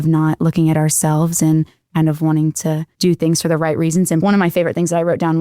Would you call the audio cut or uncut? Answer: cut